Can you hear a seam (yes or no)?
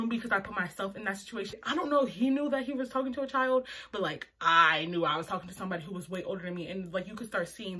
no